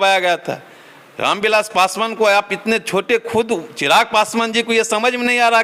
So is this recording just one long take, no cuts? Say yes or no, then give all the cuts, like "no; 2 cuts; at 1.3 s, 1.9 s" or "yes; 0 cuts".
yes; 0 cuts